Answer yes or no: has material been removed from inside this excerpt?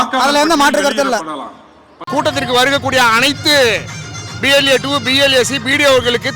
yes